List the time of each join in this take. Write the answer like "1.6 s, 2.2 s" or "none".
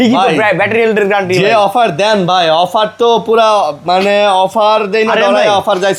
none